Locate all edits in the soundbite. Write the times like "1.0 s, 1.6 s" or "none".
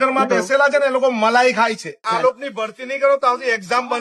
2.0 s